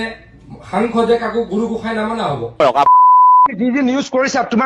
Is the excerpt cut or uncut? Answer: cut